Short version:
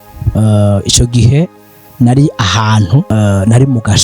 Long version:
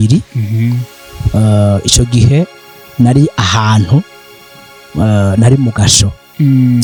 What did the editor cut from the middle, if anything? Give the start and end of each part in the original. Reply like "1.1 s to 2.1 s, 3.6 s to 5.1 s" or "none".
4.1 s to 5.0 s